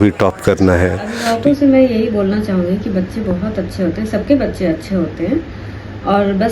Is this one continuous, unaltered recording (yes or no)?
no